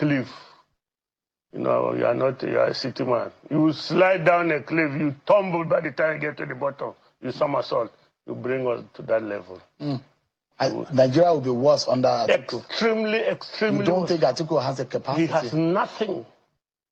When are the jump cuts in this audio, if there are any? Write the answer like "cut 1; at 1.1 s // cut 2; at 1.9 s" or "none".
none